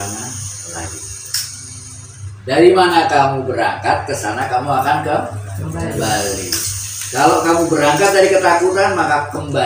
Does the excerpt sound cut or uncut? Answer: cut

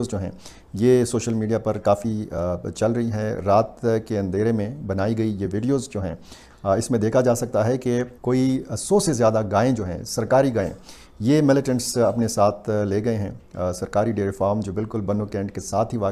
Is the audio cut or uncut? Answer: uncut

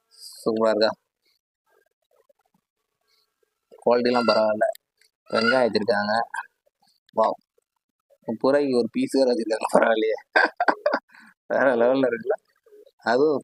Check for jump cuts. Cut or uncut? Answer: uncut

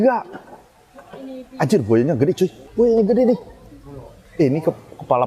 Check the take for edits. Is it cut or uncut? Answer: cut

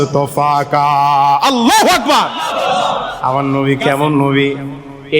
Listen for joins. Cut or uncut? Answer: cut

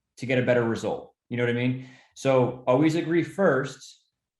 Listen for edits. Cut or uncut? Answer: cut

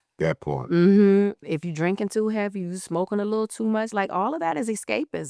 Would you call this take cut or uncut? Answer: cut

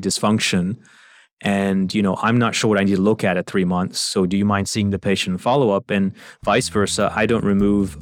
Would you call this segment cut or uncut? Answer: uncut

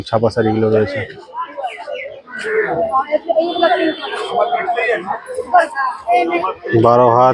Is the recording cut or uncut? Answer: cut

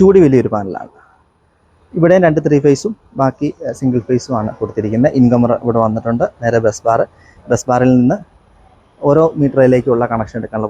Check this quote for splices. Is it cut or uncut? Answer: uncut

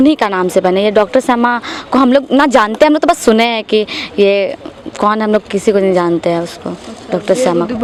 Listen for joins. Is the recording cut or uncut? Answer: uncut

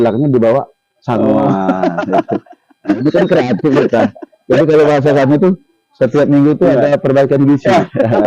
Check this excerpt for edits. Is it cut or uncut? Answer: uncut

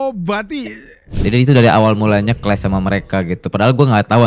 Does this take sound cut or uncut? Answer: cut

